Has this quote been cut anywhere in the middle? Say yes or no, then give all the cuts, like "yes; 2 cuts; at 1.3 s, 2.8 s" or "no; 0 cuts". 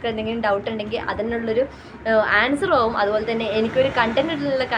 no; 0 cuts